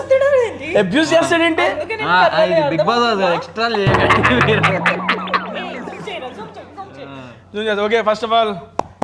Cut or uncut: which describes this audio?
uncut